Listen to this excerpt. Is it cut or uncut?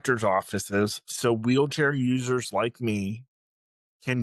uncut